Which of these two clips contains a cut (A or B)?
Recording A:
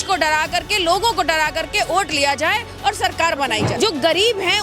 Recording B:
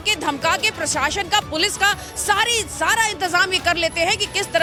A